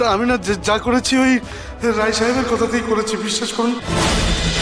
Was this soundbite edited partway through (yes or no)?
no